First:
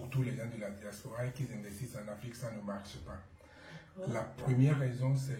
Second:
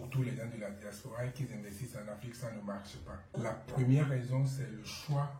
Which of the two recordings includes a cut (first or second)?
second